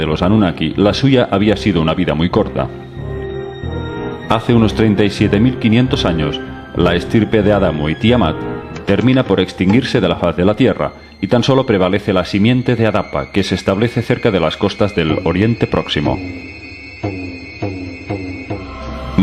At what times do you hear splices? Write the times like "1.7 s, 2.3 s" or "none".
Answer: 17.2 s